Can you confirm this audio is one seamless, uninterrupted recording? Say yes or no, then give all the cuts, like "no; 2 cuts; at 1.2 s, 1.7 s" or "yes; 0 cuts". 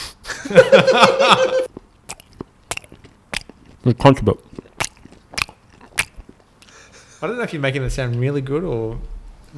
no; 1 cut; at 1.7 s